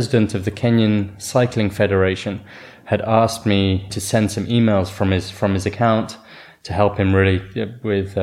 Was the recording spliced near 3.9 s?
yes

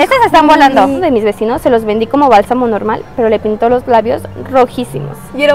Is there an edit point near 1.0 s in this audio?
yes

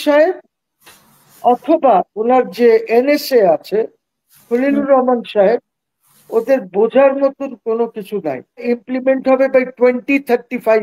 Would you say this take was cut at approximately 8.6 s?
yes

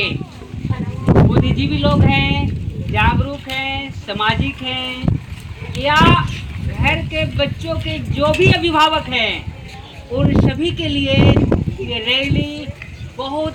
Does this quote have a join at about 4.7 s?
no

